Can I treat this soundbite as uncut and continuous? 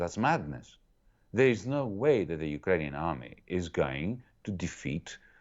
yes; 0 cuts

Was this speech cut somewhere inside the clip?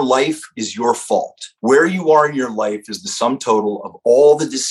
yes; 1 cut; at 1.4 s

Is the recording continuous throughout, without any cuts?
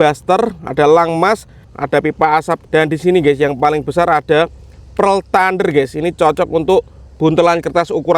no; 2 cuts; at 1.7 s, 2.6 s

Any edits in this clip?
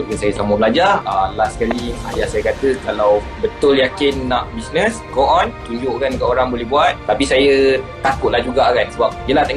yes; 2 cuts; at 1.0 s, 7.0 s

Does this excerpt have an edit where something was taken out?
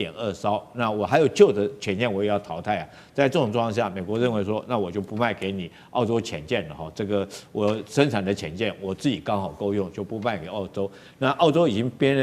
no; 0 cuts

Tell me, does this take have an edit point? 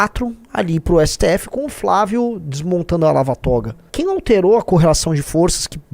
yes; 1 cut; at 3.8 s

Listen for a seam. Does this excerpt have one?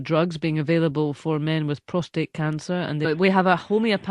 no; 0 cuts

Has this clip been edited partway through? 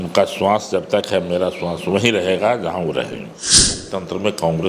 yes; 1 cut; at 3.8 s

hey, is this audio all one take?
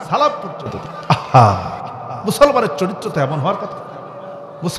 no; 1 cut; at 0.9 s

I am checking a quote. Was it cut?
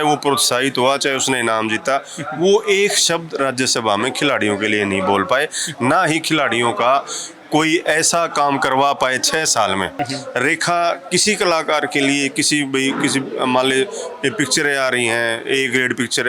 yes; 1 cut; at 9.9 s

